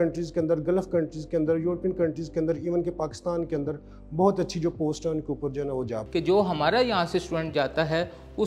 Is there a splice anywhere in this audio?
yes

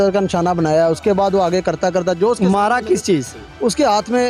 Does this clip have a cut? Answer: no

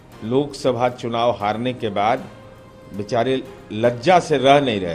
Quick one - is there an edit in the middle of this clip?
no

